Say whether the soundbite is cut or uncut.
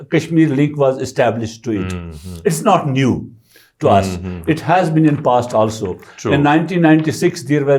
uncut